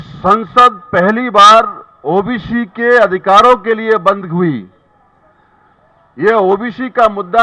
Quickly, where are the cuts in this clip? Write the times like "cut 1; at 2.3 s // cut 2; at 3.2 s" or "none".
none